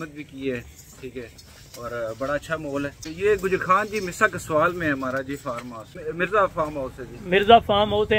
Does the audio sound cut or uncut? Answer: cut